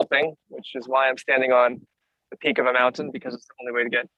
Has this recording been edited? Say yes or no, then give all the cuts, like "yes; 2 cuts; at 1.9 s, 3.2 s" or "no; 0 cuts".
no; 0 cuts